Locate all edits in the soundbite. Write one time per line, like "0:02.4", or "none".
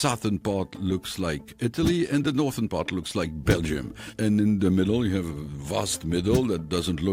0:01.5
0:04.1